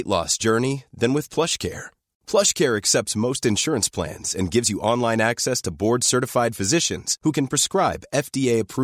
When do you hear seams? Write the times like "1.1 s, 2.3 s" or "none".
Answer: none